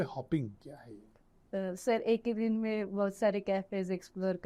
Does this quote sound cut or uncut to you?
uncut